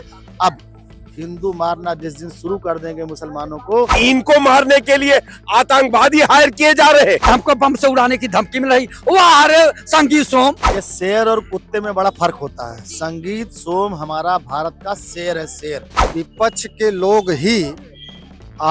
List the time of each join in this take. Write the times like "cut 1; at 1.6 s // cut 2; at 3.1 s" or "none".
cut 1; at 3.9 s // cut 2; at 7.3 s // cut 3; at 10.7 s // cut 4; at 16.0 s